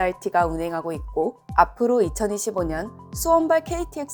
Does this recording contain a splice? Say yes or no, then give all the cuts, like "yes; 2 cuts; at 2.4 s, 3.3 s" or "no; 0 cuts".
no; 0 cuts